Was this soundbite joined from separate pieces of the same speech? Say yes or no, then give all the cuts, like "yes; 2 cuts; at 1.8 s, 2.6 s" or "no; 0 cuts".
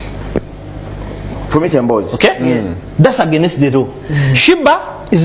no; 0 cuts